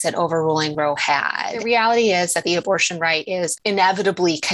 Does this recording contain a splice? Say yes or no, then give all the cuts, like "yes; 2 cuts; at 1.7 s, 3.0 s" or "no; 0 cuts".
yes; 2 cuts; at 1.6 s, 3.6 s